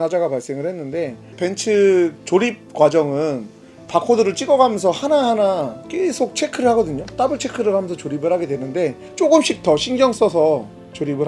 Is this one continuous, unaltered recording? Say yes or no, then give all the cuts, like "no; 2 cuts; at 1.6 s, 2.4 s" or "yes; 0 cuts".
no; 2 cuts; at 1.5 s, 9.0 s